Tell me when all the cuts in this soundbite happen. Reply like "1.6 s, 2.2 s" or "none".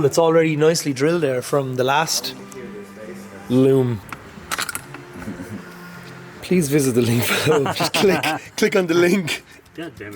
4.1 s, 6.3 s